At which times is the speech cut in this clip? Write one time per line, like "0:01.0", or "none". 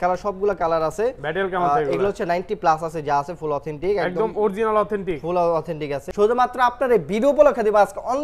0:06.0